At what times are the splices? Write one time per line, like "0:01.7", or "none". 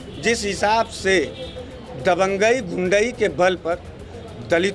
none